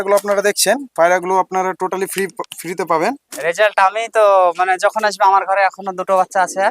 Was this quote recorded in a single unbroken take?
no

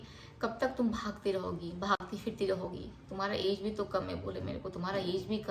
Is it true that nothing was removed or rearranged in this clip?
yes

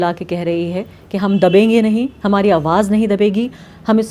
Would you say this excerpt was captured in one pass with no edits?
yes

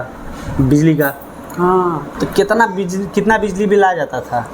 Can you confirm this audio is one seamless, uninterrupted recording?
no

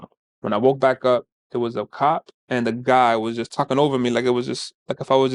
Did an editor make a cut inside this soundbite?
no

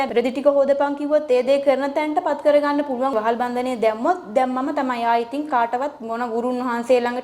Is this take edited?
yes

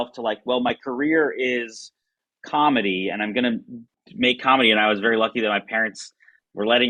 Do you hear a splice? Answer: no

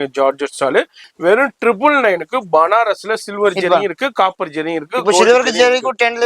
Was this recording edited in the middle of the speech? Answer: yes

